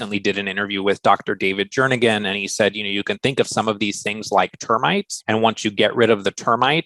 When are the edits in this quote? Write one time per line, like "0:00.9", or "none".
0:05.1